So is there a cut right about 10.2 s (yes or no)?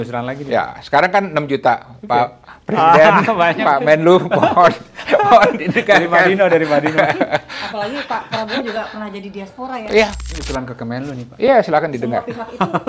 yes